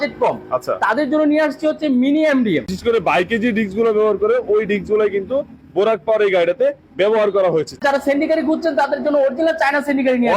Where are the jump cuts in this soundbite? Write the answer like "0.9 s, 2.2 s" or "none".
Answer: 2.7 s, 7.8 s